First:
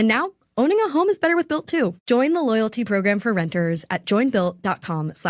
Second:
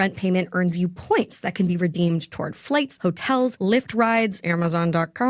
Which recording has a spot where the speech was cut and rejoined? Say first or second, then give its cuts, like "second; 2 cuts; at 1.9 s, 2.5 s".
first; 1 cut; at 2.0 s